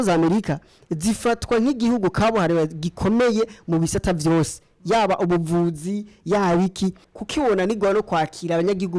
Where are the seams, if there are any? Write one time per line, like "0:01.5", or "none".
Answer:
0:07.1